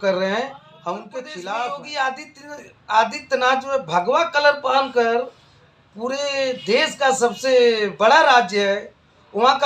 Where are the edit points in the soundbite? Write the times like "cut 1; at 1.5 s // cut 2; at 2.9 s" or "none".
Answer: cut 1; at 1.4 s

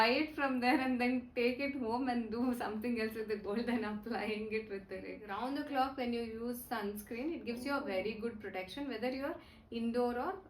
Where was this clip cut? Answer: cut 1; at 5.2 s

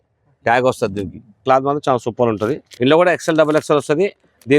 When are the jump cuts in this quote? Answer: cut 1; at 1.4 s // cut 2; at 2.7 s

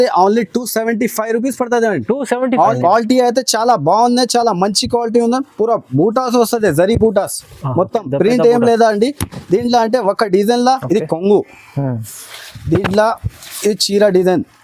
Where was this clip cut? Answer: cut 1; at 2.7 s // cut 2; at 10.8 s

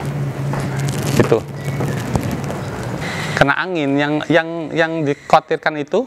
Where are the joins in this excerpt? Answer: cut 1; at 3.0 s

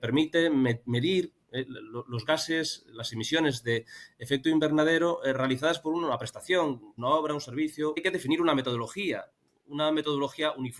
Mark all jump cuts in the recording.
cut 1; at 6.9 s // cut 2; at 8.0 s

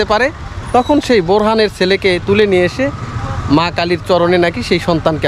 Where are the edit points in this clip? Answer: none

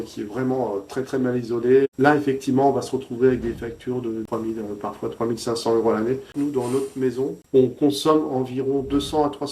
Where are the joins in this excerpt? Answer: cut 1; at 4.2 s // cut 2; at 6.3 s // cut 3; at 7.4 s

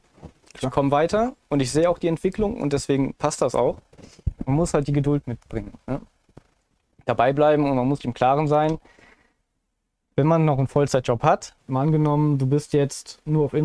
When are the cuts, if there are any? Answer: cut 1; at 11.6 s

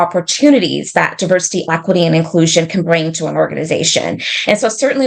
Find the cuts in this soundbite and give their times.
none

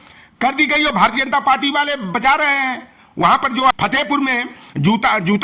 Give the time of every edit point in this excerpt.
cut 1; at 3.7 s

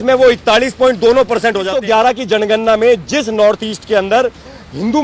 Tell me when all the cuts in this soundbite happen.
cut 1; at 1.7 s

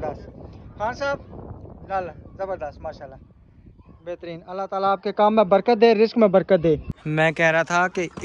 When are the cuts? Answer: cut 1; at 7.0 s

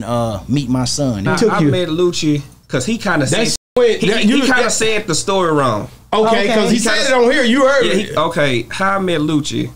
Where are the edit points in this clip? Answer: cut 1; at 1.3 s

